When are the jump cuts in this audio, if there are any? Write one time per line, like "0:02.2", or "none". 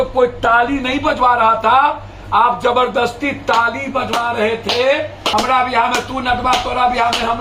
0:05.3